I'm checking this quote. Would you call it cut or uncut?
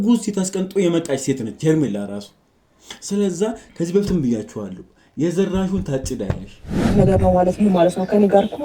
cut